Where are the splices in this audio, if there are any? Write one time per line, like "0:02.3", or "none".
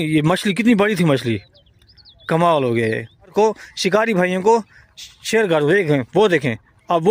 0:03.3